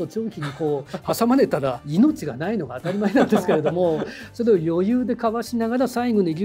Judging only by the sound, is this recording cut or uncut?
cut